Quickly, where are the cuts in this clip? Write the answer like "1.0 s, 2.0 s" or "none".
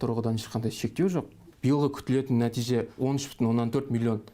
1.5 s, 2.9 s